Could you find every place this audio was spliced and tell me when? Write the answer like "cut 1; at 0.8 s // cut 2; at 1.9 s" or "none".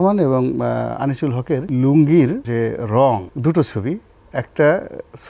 cut 1; at 1.7 s // cut 2; at 2.4 s // cut 3; at 3.3 s